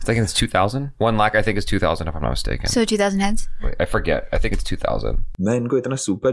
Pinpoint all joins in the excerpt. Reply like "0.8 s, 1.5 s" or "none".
5.3 s